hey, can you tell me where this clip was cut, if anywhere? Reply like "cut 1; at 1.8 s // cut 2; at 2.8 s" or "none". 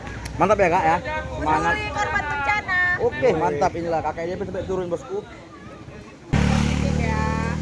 cut 1; at 6.3 s